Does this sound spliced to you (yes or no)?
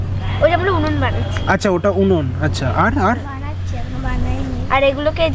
no